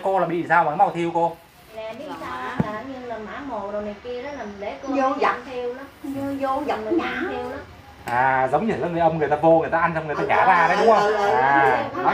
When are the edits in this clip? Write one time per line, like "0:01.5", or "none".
0:01.7

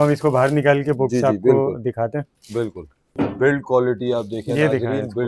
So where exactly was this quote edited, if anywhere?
0:03.1

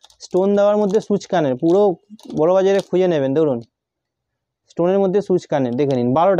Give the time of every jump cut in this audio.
none

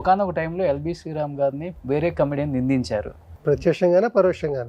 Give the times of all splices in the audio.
0:01.7
0:03.3

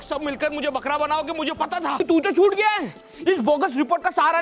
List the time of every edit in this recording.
0:02.0

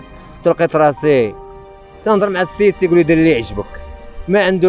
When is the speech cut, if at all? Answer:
0:01.4

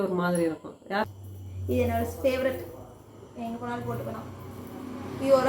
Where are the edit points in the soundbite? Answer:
0:01.1

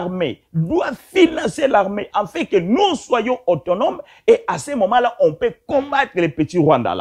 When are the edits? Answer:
none

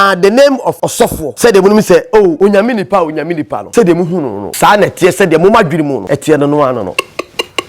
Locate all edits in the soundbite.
0:00.9
0:02.4
0:03.6
0:04.4
0:06.0
0:06.9

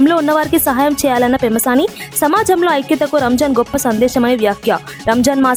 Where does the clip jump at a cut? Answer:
none

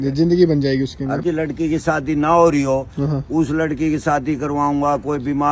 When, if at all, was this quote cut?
0:01.2

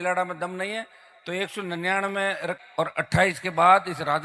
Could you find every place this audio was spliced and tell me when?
0:02.6

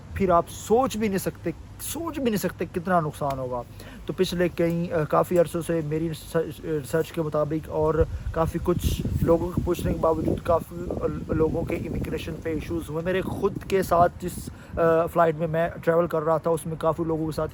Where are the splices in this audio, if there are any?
none

